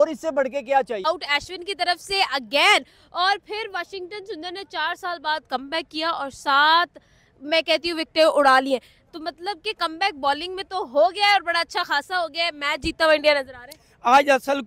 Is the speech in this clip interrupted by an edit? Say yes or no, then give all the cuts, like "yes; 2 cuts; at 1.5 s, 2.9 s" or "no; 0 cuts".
no; 0 cuts